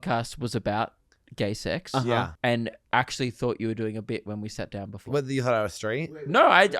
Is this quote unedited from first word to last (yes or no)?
no